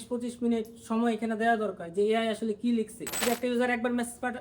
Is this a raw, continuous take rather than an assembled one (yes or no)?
no